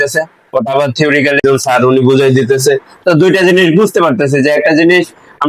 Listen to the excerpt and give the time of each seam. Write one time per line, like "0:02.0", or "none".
0:01.4